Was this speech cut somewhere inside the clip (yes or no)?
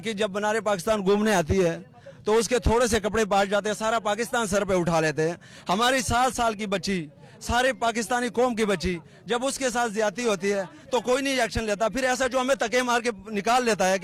no